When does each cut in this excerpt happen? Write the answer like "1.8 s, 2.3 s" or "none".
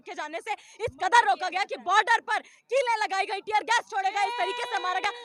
none